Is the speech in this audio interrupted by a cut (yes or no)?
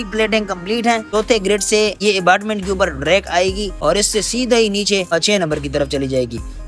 yes